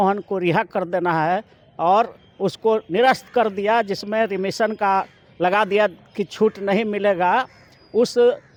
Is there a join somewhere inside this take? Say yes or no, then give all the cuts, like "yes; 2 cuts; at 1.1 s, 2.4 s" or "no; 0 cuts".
no; 0 cuts